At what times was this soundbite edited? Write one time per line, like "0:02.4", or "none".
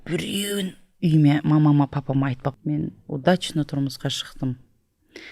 0:02.5

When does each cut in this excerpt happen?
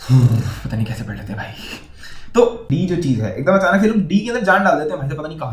0:02.6

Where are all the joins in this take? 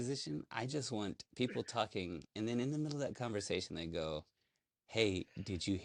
none

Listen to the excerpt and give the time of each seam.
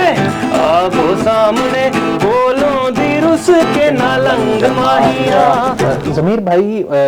0:05.8

